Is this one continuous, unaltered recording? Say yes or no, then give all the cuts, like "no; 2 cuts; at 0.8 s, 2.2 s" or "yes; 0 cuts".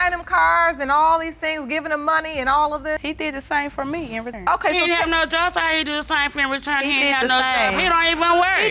yes; 0 cuts